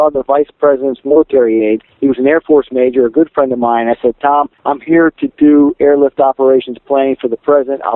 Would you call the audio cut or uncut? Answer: cut